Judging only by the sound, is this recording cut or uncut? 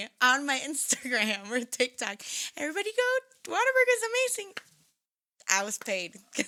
uncut